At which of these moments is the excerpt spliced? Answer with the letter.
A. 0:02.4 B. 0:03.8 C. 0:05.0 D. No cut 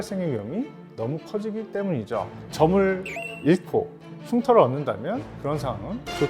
A